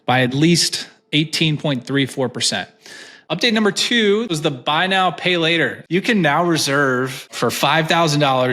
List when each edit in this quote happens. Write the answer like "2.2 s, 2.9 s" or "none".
3.1 s, 4.3 s, 5.8 s, 7.3 s